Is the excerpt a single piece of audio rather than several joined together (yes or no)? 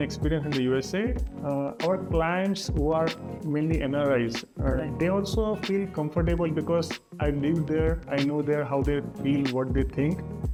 yes